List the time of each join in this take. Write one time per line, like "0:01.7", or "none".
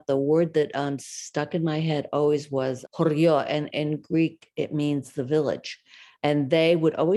none